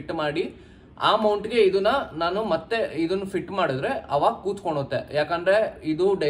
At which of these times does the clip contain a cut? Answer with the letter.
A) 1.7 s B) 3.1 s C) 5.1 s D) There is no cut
D